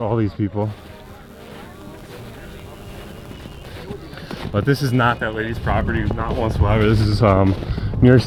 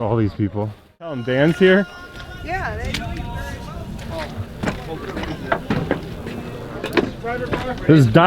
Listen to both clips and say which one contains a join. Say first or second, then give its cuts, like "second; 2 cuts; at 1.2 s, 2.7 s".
second; 1 cut; at 1.2 s